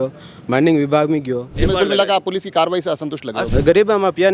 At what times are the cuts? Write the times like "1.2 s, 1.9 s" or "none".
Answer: 1.6 s, 3.4 s